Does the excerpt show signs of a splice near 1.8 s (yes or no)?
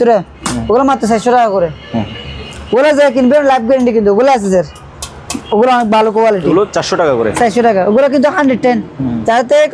no